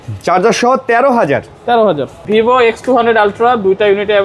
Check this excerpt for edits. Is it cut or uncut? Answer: cut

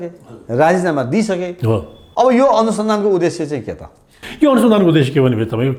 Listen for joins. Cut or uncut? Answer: uncut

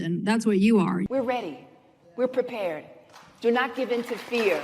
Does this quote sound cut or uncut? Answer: cut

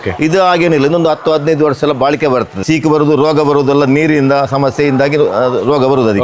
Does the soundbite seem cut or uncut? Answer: cut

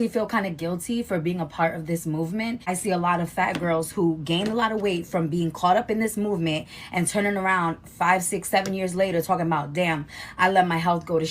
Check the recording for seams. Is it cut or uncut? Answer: cut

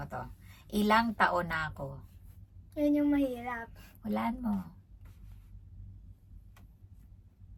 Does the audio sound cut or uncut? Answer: uncut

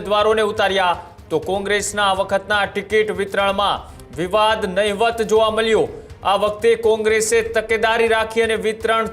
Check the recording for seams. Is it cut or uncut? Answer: uncut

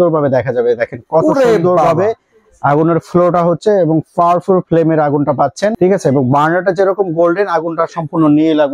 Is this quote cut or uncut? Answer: uncut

